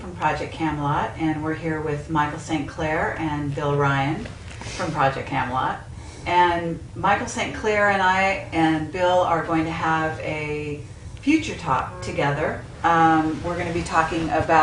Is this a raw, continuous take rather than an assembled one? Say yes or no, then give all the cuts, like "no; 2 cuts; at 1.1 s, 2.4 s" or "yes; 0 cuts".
yes; 0 cuts